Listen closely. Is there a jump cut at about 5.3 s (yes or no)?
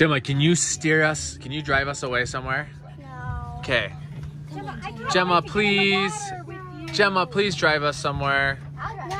no